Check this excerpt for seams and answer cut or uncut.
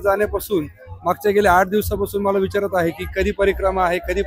uncut